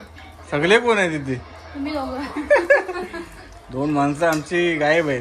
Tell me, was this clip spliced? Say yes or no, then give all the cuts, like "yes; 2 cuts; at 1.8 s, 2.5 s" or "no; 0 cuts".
no; 0 cuts